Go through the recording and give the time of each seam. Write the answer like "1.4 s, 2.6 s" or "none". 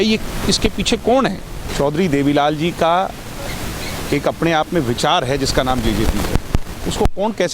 1.6 s